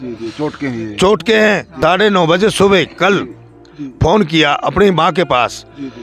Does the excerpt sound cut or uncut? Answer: cut